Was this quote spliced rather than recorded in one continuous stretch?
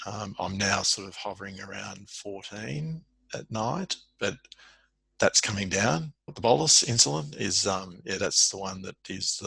yes; 1 cut; at 6.3 s

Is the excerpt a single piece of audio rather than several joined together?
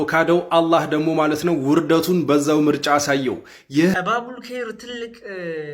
no; 1 cut; at 3.9 s

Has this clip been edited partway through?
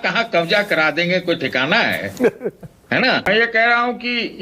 yes; 1 cut; at 3.3 s

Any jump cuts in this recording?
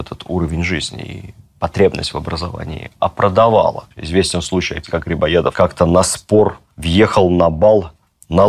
yes; 1 cut; at 3.9 s

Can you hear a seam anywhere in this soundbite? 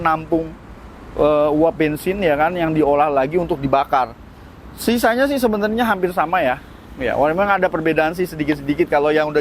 no; 0 cuts

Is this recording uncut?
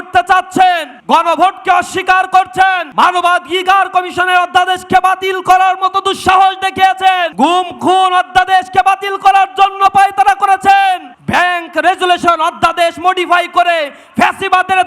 no; 4 cuts; at 0.9 s, 2.8 s, 7.3 s, 11.1 s

